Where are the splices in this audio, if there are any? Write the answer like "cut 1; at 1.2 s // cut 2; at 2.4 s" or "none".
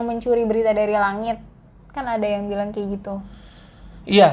none